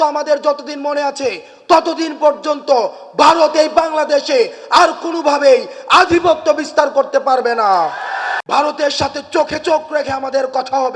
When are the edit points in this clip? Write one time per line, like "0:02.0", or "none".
0:08.4